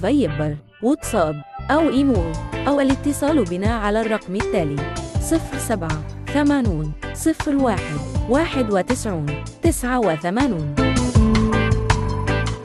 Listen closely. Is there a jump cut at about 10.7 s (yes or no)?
no